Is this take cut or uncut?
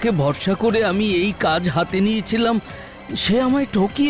uncut